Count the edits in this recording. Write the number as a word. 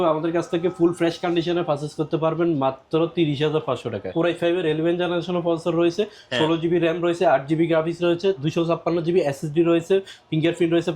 one